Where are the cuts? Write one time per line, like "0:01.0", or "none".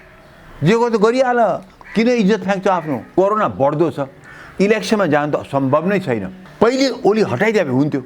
0:03.1
0:06.4